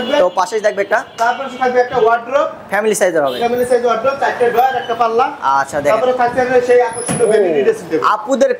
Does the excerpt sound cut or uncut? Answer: uncut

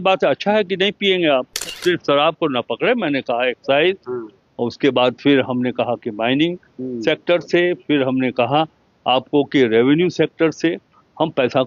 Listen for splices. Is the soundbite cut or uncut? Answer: cut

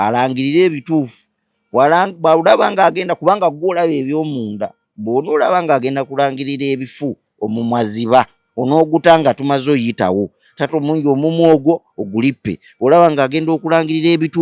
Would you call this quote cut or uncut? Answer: uncut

